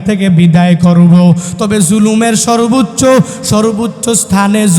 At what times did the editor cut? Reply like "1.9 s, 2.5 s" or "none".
none